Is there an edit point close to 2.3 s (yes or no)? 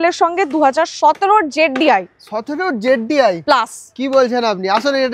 no